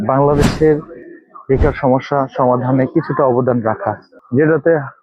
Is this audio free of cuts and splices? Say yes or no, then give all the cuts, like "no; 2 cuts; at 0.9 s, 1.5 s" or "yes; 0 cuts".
no; 1 cut; at 4.1 s